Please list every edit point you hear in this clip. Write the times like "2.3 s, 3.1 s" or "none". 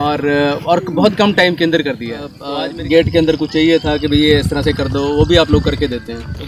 2.4 s